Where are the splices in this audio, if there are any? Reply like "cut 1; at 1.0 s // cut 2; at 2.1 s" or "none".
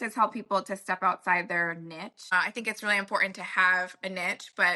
cut 1; at 2.3 s